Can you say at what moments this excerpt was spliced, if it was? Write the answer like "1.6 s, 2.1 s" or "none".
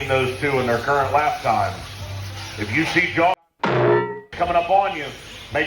3.3 s, 4.2 s